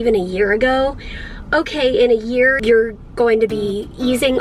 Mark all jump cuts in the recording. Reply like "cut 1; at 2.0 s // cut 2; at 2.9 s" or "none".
cut 1; at 2.6 s